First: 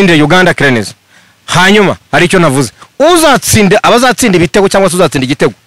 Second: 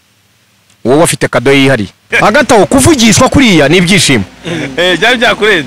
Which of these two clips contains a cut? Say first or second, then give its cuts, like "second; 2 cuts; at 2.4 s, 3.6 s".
second; 1 cut; at 2.0 s